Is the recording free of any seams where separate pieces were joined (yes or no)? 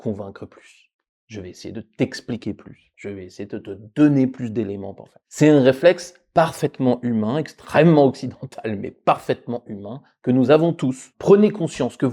no